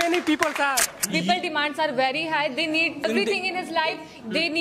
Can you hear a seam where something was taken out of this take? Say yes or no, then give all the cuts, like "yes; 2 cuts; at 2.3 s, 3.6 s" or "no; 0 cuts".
yes; 2 cuts; at 0.9 s, 3.0 s